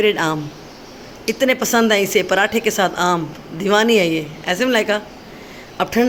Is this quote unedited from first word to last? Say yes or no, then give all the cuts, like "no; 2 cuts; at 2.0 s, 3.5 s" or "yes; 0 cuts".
yes; 0 cuts